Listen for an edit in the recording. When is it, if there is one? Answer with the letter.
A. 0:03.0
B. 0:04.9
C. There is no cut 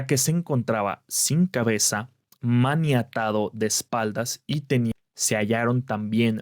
B